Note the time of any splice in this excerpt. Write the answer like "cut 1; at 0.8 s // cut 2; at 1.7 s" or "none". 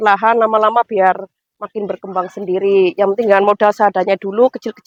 none